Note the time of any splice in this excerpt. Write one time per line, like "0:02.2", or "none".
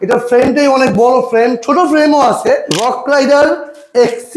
0:02.7

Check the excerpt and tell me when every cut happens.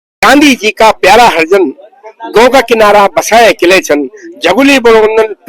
none

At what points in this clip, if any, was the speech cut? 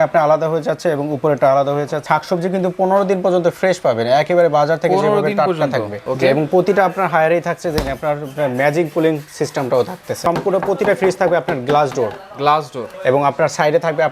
0:02.0
0:06.0
0:10.2
0:12.9

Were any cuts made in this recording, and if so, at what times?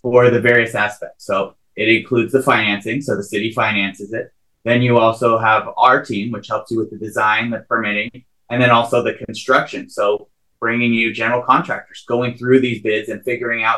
none

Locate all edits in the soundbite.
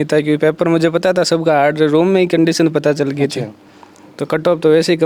none

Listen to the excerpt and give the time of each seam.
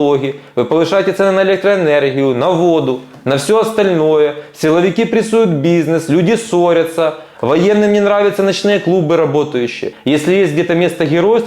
0:09.9

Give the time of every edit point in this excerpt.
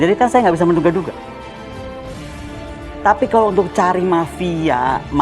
0:01.6
0:02.9

